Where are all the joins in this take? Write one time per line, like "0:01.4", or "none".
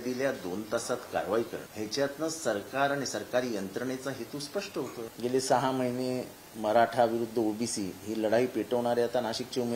0:01.6
0:05.1